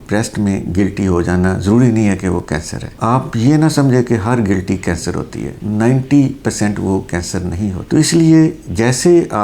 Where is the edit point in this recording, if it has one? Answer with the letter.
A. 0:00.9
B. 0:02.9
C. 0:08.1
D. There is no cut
D